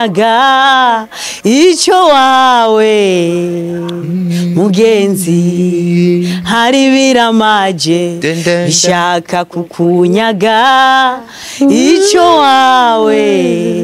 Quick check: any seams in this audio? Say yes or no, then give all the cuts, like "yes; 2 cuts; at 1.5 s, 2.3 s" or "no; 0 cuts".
no; 0 cuts